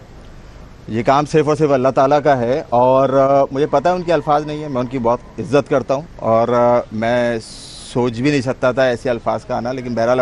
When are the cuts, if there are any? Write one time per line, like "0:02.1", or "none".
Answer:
0:03.5